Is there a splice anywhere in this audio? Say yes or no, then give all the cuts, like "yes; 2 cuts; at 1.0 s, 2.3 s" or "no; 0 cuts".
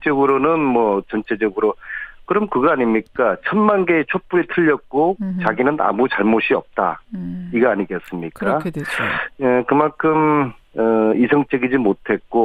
no; 0 cuts